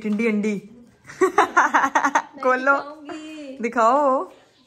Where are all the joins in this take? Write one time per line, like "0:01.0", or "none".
none